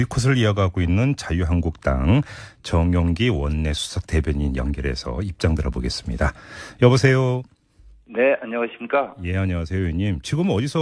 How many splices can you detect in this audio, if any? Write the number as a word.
zero